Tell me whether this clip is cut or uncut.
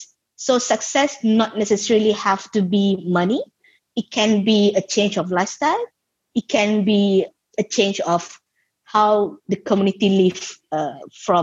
cut